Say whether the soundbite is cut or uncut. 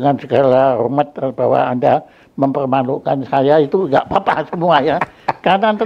uncut